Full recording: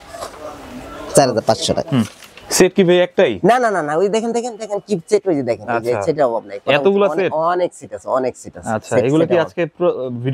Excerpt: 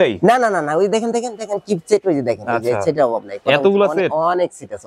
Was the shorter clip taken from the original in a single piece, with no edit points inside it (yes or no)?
yes